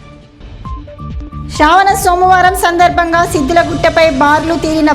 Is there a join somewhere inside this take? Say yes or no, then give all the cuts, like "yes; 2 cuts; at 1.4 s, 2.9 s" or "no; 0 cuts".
yes; 1 cut; at 1.3 s